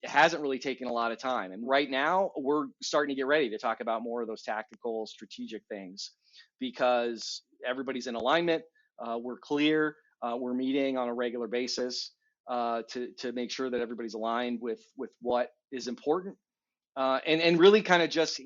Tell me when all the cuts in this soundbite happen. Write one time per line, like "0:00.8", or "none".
0:01.6